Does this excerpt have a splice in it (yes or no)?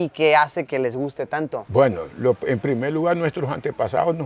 no